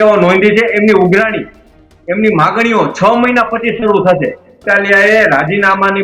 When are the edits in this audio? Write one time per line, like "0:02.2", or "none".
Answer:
0:04.6